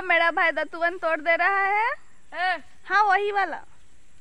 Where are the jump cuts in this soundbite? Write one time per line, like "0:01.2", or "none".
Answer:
none